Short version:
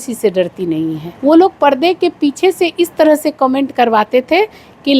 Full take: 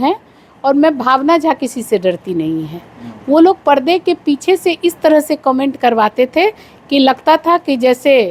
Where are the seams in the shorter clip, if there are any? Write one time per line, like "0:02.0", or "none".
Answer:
0:01.1